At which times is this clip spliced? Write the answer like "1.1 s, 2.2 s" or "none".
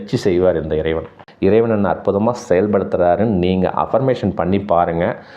1.2 s